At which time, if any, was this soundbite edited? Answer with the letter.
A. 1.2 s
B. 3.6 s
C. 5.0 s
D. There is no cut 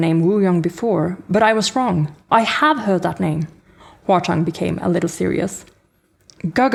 D